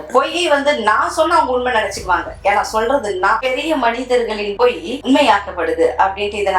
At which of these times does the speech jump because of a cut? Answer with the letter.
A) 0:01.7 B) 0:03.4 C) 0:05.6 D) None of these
B